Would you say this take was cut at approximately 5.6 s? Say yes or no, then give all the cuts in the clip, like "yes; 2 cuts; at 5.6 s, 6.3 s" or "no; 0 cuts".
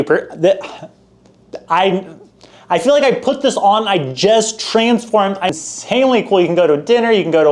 yes; 1 cut; at 5.6 s